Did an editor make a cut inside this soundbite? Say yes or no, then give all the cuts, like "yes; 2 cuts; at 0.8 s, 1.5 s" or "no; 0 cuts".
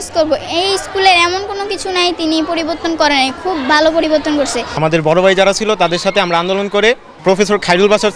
yes; 2 cuts; at 4.7 s, 7.1 s